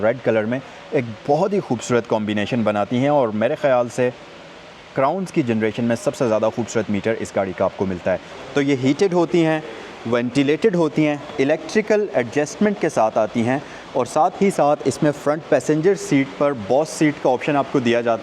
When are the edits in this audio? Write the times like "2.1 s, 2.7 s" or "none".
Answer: 8.3 s